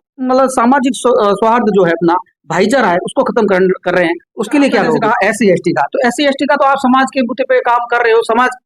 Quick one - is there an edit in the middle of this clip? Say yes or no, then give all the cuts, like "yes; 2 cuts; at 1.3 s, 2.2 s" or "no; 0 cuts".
yes; 1 cut; at 5.0 s